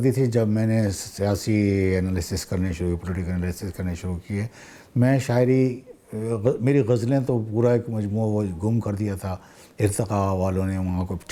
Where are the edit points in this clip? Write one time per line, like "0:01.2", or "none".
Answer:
none